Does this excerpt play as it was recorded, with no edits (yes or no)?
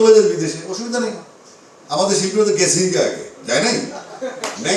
yes